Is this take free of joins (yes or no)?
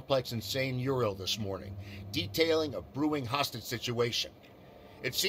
yes